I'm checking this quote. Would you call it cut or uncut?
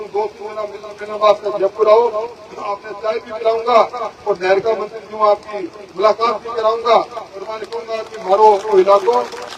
uncut